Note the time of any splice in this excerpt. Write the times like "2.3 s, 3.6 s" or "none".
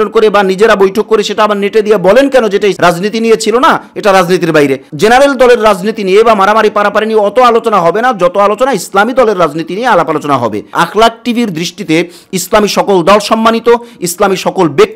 4.9 s, 10.6 s